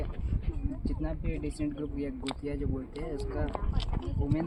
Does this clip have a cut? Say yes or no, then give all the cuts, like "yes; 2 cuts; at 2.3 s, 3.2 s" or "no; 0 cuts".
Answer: no; 0 cuts